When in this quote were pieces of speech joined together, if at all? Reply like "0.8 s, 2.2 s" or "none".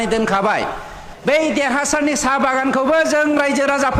1.1 s